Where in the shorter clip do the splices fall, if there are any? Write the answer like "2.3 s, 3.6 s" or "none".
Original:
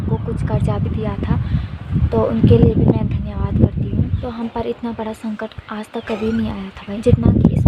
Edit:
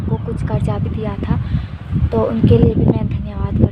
none